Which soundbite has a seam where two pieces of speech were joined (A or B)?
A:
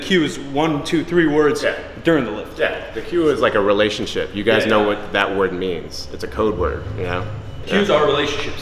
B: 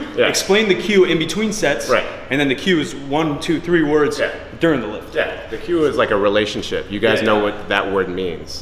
A